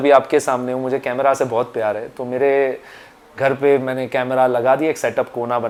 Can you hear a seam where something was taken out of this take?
no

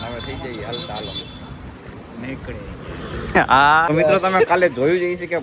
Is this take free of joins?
no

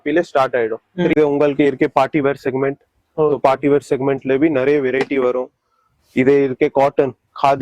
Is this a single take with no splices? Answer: no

